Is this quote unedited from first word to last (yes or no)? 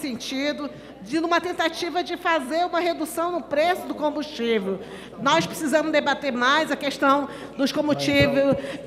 yes